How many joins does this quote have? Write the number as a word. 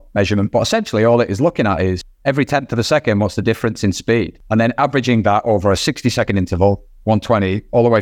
two